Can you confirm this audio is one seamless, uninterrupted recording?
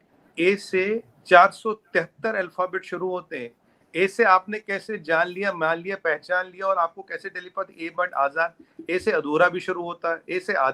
yes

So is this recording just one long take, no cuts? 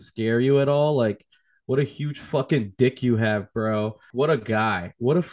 no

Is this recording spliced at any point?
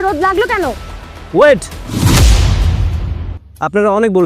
yes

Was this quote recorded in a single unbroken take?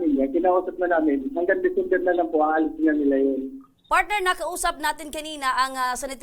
no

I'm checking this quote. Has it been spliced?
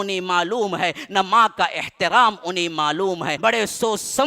yes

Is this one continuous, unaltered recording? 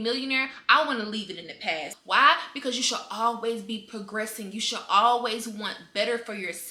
no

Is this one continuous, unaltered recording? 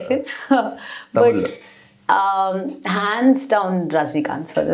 yes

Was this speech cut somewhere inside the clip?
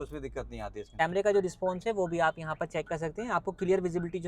yes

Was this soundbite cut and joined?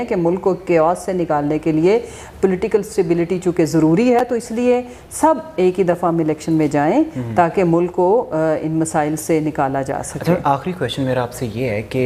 no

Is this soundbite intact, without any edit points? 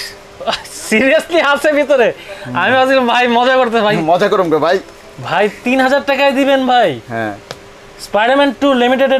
yes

